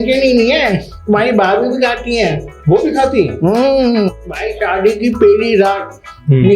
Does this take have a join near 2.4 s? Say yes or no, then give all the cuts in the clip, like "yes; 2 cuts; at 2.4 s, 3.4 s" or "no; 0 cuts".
no; 1 cut; at 4.4 s